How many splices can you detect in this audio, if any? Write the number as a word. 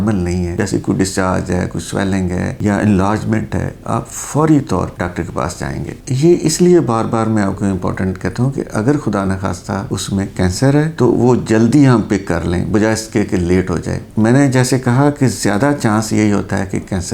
zero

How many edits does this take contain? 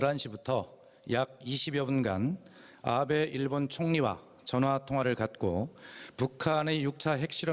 one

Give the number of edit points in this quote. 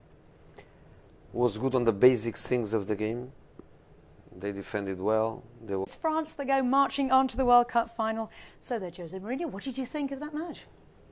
zero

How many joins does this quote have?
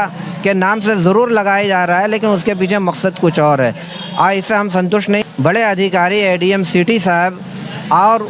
one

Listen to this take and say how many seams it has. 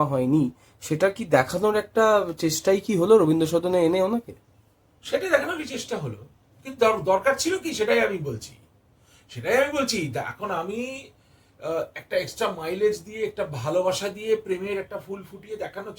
zero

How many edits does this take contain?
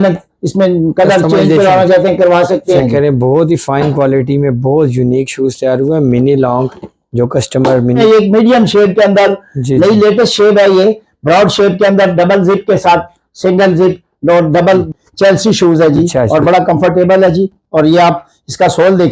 three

